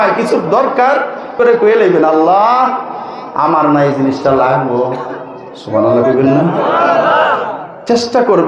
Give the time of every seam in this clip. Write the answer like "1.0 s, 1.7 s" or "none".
1.3 s